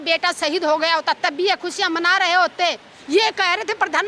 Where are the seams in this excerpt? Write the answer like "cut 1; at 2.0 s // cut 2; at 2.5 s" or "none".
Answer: cut 1; at 2.9 s